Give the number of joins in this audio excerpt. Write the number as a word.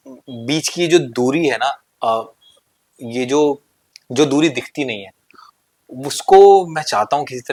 zero